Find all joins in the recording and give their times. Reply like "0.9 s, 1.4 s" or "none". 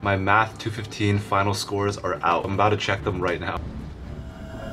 2.5 s, 3.6 s